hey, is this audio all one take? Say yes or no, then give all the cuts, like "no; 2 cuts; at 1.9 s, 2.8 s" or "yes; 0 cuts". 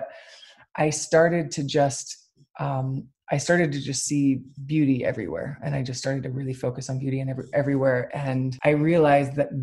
no; 1 cut; at 8.5 s